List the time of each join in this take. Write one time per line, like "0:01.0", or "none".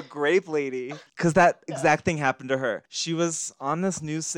0:01.0
0:02.9